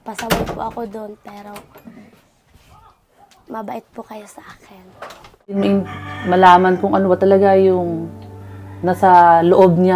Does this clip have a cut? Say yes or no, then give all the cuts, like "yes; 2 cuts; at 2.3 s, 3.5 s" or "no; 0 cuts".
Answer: yes; 1 cut; at 5.6 s